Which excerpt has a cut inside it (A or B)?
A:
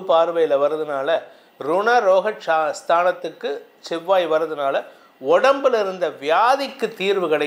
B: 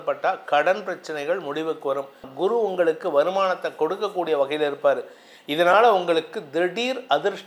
B